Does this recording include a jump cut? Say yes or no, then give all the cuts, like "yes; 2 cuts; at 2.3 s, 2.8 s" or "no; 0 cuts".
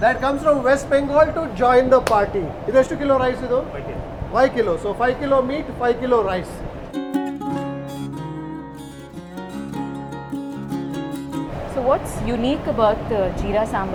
no; 0 cuts